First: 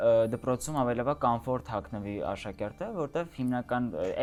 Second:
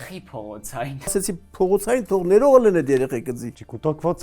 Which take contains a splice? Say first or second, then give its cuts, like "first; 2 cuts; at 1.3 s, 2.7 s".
second; 1 cut; at 1.1 s